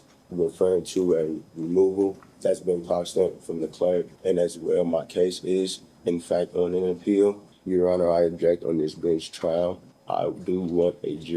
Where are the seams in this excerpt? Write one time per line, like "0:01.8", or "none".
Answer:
0:02.3
0:04.1
0:07.5
0:09.9